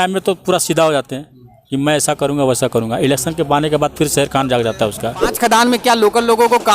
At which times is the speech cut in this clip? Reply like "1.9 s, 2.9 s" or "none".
5.3 s

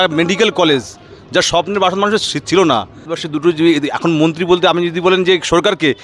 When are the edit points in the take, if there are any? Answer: 3.0 s

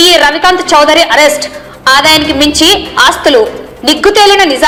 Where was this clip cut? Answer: none

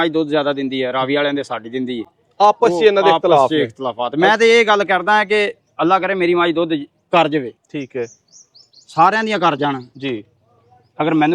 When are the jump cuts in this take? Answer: none

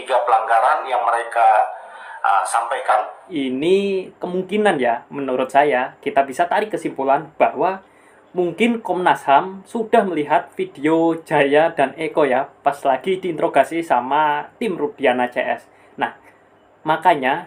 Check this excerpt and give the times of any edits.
3.2 s

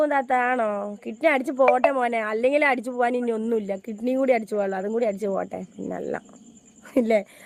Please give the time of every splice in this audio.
none

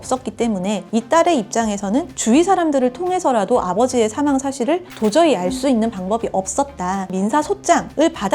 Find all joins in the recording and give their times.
7.1 s

